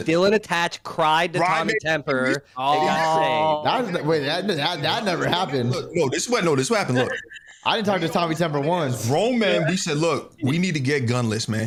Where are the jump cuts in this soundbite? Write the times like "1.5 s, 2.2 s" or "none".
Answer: none

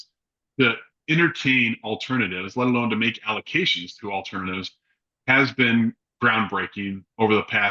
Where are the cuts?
none

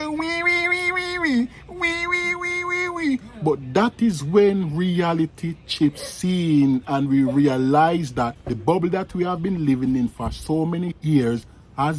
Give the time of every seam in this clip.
8.5 s

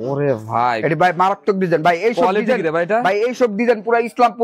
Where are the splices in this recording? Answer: none

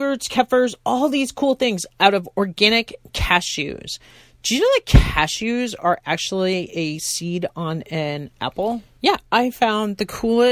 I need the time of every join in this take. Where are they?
8.9 s

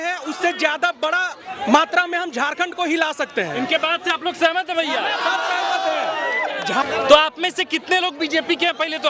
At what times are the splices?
6.8 s

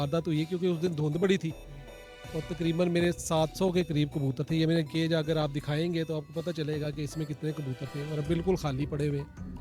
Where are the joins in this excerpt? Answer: none

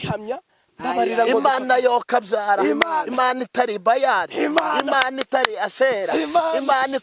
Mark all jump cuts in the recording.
none

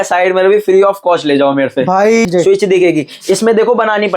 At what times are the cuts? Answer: 2.3 s

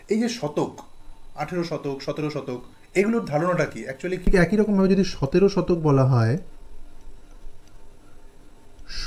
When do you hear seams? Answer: 4.3 s

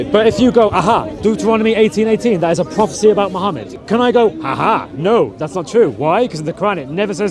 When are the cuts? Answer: 3.7 s

